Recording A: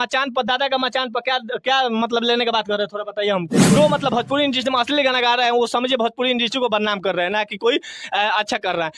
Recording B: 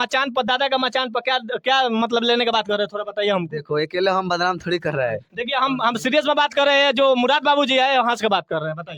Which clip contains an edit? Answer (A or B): A